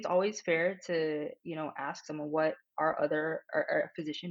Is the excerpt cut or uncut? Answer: uncut